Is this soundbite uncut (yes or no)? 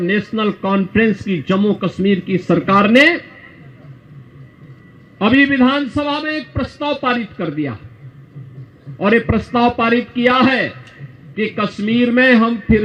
yes